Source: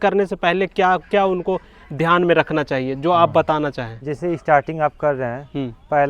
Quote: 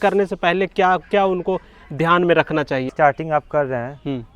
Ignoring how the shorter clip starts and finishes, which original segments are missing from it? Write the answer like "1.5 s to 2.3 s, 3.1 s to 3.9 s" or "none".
2.9 s to 4.4 s